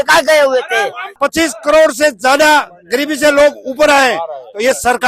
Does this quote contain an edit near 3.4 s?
no; 1 cut; at 1.1 s

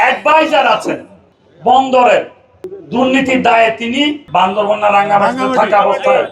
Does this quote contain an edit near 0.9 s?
no; 1 cut; at 4.2 s

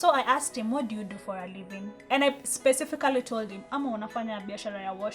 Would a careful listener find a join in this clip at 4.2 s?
no; 1 cut; at 1.9 s

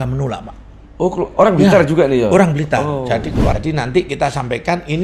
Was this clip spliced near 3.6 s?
yes; 1 cut; at 3.6 s

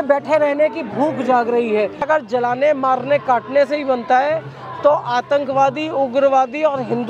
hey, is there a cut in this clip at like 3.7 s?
no; 1 cut; at 2.1 s

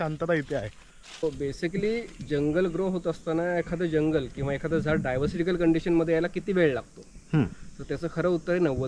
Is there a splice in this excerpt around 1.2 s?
yes; 1 cut; at 1.2 s

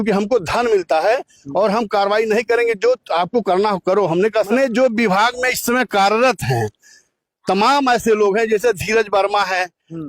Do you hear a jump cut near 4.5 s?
yes; 1 cut; at 4.5 s

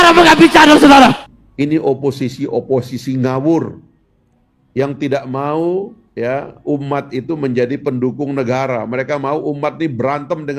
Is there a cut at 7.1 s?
no; 1 cut; at 1.2 s

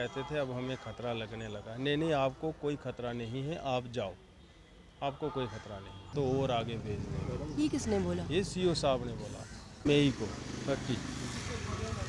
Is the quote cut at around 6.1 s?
yes; 2 cuts; at 6.1 s, 9.8 s

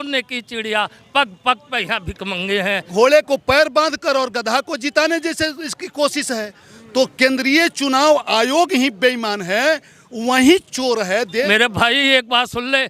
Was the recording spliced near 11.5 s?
yes; 2 cuts; at 2.8 s, 11.5 s

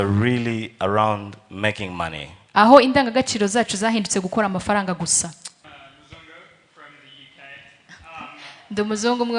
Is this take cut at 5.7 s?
yes; 1 cut; at 5.7 s

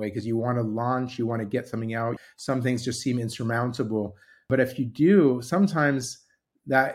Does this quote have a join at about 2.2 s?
yes; 2 cuts; at 2.2 s, 4.5 s

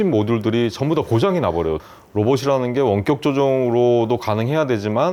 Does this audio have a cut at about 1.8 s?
yes; 1 cut; at 1.8 s

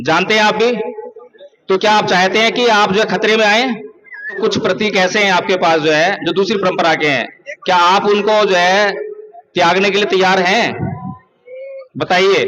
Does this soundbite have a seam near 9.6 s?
no; 1 cut; at 4.4 s

